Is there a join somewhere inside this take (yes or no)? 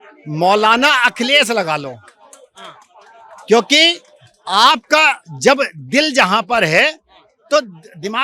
no